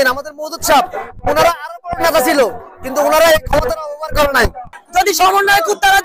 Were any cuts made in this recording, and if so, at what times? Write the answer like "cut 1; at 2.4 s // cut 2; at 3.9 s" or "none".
cut 1; at 4.8 s